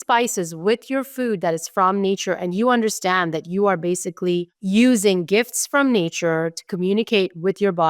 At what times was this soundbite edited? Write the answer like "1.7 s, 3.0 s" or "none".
4.5 s

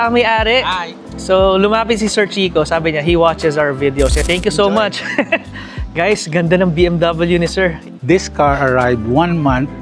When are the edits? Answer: 7.8 s

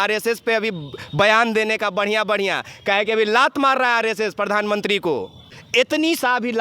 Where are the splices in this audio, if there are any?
5.5 s

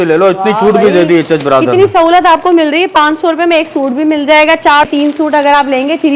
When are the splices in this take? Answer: 4.9 s

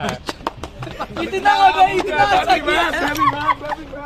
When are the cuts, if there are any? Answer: none

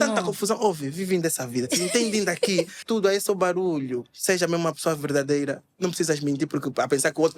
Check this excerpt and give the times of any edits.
2.8 s

